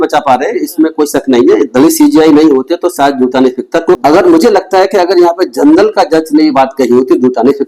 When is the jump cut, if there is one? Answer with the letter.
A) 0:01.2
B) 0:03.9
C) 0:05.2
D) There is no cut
B